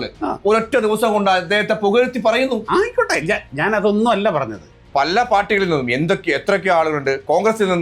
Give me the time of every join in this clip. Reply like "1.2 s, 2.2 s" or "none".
4.8 s